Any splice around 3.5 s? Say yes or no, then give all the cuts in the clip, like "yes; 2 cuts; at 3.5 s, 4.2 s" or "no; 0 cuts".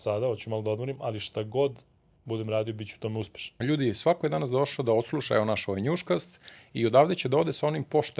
yes; 1 cut; at 3.5 s